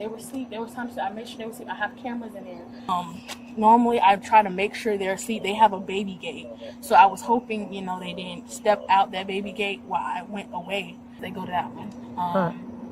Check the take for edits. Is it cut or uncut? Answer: cut